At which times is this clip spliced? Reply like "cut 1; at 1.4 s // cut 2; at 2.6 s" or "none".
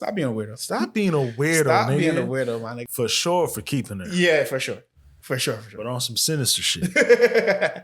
cut 1; at 2.7 s

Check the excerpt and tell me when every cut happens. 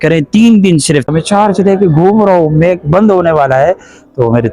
cut 1; at 1.1 s

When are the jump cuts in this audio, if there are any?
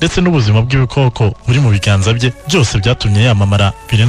none

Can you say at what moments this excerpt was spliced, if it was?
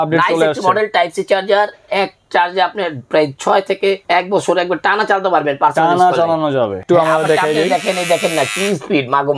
cut 1; at 4.0 s // cut 2; at 6.8 s

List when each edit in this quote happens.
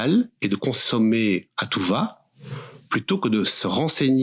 none

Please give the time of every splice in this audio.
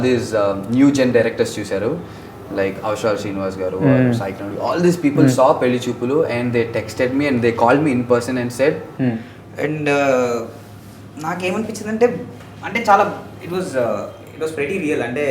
cut 1; at 8.9 s

